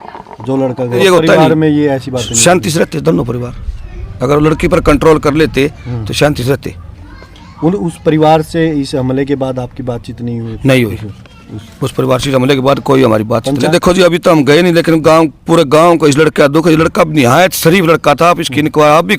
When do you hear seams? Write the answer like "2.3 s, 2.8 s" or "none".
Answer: 1.0 s, 13.6 s